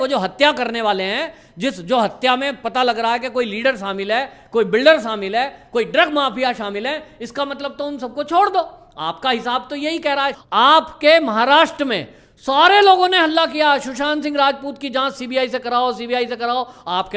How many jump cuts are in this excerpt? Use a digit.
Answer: 1